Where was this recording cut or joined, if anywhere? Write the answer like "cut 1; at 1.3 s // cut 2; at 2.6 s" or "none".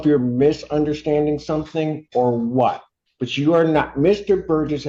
none